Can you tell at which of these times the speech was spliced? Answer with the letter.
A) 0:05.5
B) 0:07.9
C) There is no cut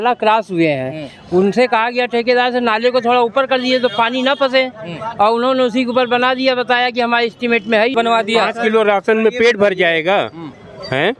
B